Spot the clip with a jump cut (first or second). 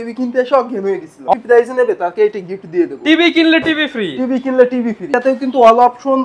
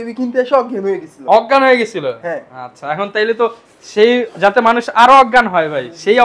first